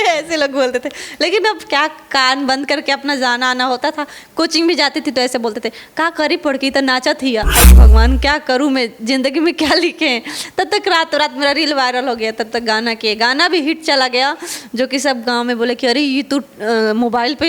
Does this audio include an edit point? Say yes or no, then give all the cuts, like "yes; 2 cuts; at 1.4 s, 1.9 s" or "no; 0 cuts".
yes; 1 cut; at 7.7 s